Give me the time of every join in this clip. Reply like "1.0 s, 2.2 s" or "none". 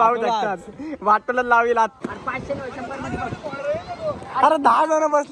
1.9 s